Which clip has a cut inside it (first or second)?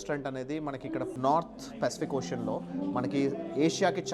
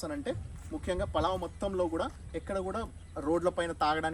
first